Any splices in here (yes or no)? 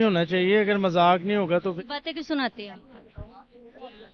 yes